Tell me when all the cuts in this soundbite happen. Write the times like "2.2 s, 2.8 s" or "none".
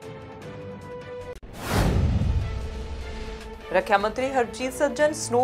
3.5 s